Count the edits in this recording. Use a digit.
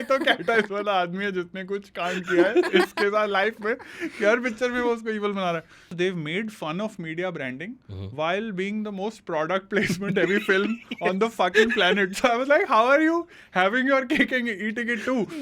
1